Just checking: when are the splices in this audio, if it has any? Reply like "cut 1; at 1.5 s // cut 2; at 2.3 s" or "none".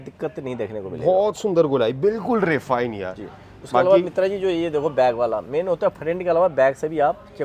none